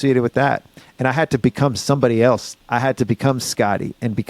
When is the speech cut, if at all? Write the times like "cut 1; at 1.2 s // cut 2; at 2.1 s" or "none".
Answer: cut 1; at 2.5 s